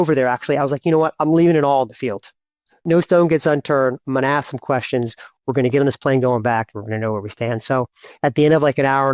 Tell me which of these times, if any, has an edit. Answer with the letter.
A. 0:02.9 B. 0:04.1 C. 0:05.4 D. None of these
A